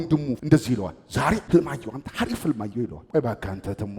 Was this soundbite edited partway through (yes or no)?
yes